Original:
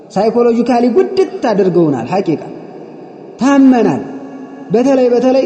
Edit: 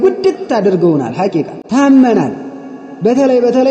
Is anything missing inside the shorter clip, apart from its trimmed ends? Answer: yes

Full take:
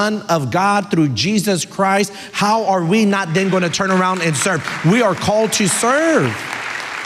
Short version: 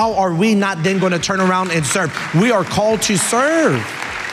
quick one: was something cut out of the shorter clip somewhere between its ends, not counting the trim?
no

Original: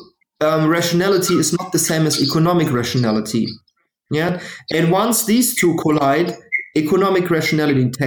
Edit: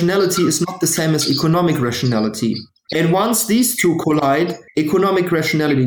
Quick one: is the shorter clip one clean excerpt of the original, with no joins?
no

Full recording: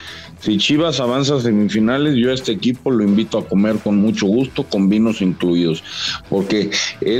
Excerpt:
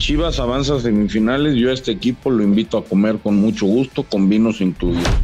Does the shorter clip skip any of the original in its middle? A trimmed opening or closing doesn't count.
no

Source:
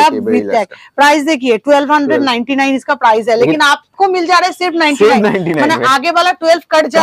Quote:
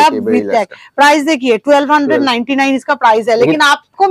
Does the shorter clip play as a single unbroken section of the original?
yes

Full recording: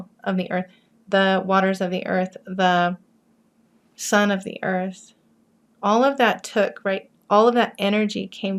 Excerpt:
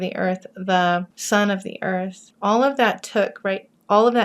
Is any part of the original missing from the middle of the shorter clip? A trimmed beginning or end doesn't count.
yes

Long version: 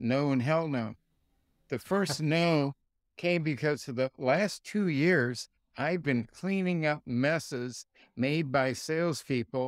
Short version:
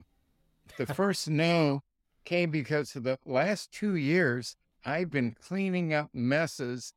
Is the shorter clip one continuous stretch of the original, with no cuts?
yes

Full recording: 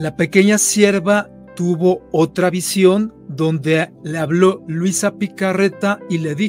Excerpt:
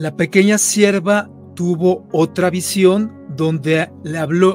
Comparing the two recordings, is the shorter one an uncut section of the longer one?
yes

